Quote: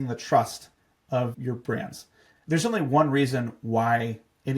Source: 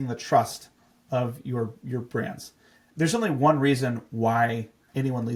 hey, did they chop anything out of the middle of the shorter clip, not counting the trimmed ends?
yes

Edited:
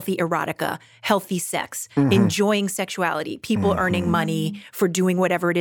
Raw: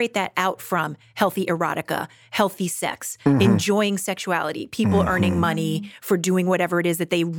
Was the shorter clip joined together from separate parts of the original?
no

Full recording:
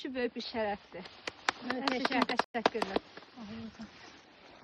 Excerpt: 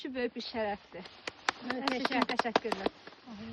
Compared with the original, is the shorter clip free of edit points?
no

